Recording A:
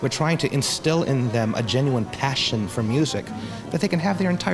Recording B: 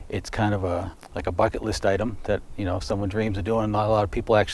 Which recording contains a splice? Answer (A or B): B